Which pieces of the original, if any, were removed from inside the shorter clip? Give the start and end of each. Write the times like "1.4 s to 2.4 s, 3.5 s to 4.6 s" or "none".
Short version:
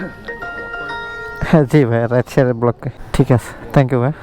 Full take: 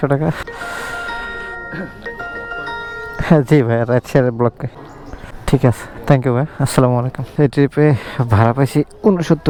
4.7 s to 5.3 s